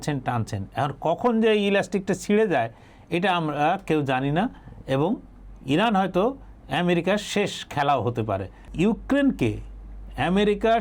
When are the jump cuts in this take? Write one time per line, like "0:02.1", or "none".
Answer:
0:08.6